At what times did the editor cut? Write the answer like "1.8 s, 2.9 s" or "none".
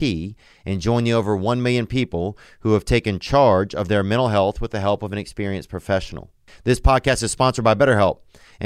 6.5 s